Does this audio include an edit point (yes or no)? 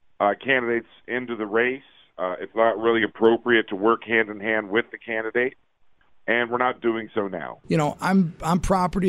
yes